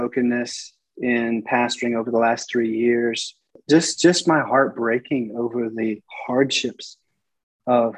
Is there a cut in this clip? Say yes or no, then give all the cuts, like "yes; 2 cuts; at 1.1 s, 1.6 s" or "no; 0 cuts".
yes; 1 cut; at 3.6 s